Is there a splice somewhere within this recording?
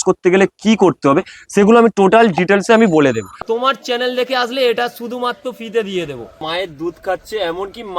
yes; 2 cuts; at 3.4 s, 6.4 s

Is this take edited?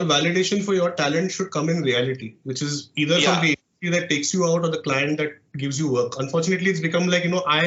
no; 0 cuts

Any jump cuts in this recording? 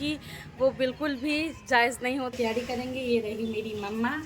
yes; 1 cut; at 2.3 s

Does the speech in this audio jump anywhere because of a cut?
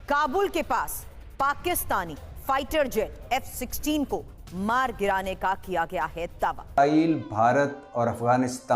yes; 1 cut; at 6.8 s

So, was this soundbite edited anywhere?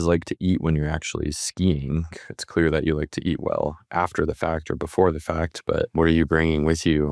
yes; 2 cuts; at 2.1 s, 5.9 s

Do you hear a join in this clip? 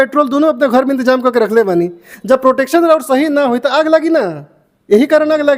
no; 0 cuts

